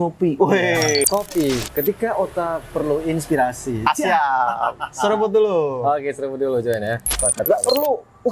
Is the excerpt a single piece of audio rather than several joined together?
no; 2 cuts; at 1.0 s, 7.1 s

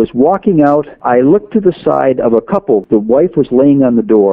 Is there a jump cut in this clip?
yes; 2 cuts; at 0.9 s, 2.8 s

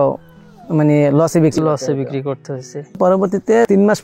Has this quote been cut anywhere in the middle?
yes; 1 cut; at 2.9 s

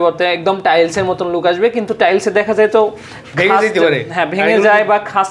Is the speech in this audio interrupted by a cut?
no; 0 cuts

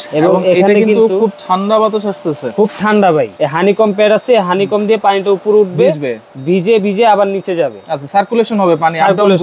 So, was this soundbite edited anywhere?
yes; 1 cut; at 3.3 s

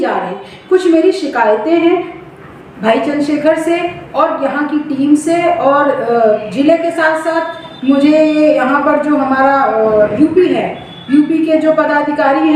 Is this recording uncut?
yes; 0 cuts

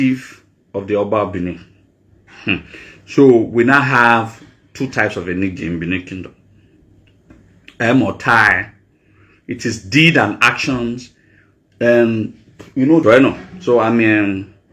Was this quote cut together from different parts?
yes; 1 cut; at 13.0 s

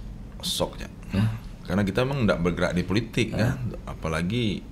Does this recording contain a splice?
no; 0 cuts

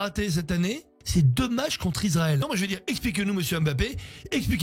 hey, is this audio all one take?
no; 2 cuts; at 0.9 s, 2.5 s

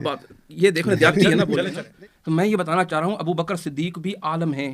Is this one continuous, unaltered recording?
no; 1 cut; at 1.6 s

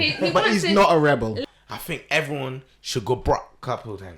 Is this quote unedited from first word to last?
no; 1 cut; at 1.4 s

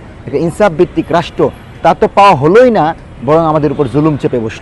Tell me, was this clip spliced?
no; 0 cuts

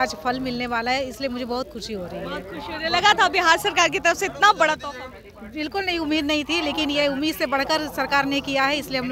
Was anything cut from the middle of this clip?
no; 0 cuts

